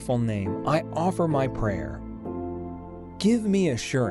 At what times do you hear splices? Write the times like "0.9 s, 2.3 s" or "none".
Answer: 2.0 s, 3.1 s